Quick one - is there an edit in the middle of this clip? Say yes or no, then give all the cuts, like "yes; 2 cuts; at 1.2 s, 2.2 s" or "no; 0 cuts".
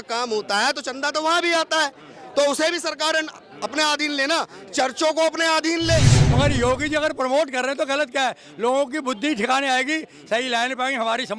yes; 1 cut; at 6.2 s